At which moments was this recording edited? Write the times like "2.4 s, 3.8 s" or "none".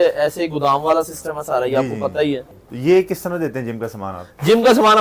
2.5 s